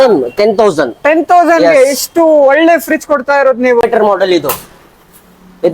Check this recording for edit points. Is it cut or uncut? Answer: cut